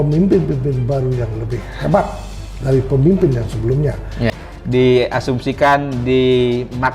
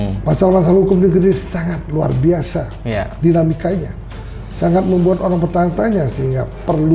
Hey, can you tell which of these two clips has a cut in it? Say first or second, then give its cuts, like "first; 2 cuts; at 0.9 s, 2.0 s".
first; 1 cut; at 4.3 s